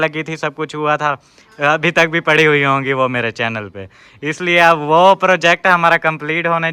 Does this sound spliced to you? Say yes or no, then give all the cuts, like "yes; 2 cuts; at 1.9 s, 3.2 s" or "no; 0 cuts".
no; 0 cuts